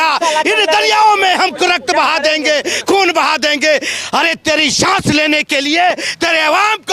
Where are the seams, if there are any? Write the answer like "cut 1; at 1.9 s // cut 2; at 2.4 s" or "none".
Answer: none

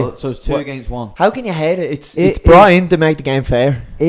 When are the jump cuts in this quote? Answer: none

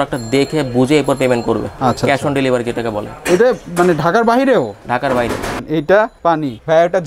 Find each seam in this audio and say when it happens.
cut 1; at 5.6 s

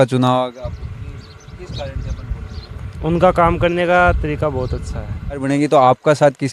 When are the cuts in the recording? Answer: cut 1; at 5.4 s

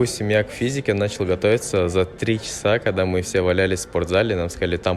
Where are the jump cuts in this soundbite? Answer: none

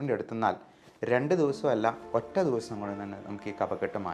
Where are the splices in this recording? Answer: none

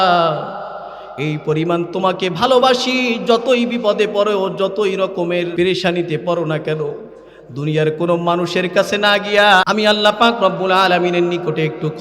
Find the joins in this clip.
cut 1; at 5.5 s // cut 2; at 9.6 s

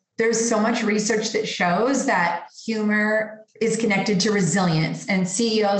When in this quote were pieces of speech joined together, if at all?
cut 1; at 3.4 s

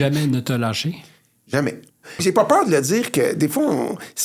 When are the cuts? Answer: cut 1; at 2.2 s

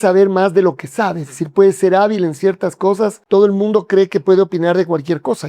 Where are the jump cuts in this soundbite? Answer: cut 1; at 3.2 s

